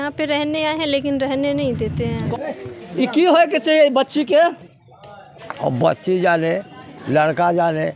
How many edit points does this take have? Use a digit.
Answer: 1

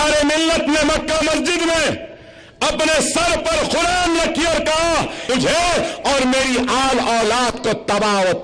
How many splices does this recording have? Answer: 1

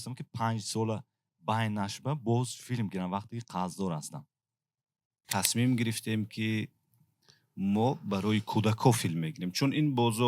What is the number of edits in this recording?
1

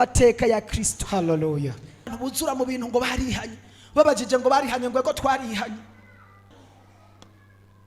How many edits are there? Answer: 2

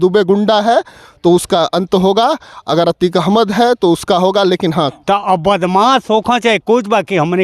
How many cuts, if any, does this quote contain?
1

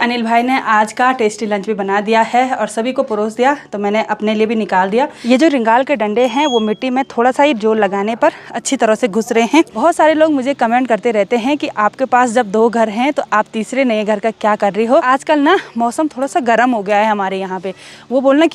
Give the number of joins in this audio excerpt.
3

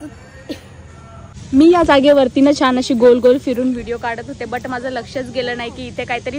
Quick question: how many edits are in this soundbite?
1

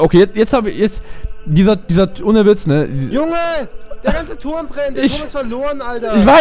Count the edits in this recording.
0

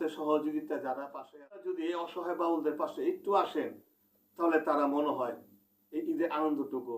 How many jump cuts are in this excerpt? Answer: 1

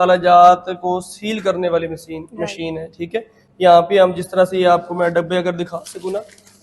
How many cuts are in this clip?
0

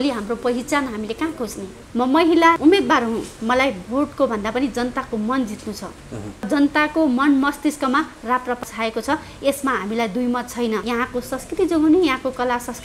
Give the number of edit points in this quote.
4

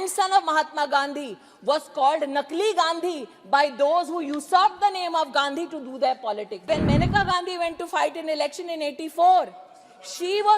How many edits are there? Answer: 1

